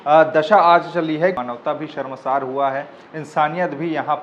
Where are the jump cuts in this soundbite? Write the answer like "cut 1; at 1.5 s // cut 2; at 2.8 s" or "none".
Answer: cut 1; at 1.4 s